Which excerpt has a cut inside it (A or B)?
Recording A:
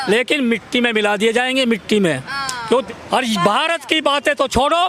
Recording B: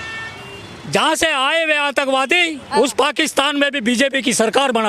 A